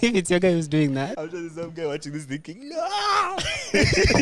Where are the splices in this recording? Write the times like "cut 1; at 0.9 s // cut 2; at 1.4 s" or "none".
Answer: cut 1; at 1.2 s